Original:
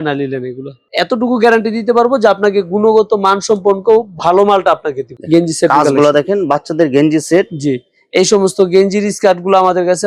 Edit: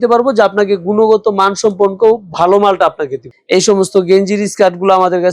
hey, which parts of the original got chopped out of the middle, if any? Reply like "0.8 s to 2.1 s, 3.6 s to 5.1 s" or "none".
5.1 s to 7.9 s

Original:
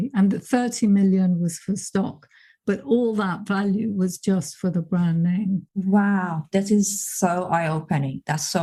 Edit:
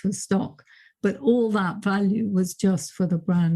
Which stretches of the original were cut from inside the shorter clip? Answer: none

